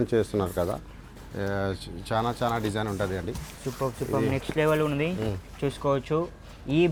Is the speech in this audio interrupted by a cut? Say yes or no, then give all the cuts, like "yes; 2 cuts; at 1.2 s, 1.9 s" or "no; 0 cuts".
no; 0 cuts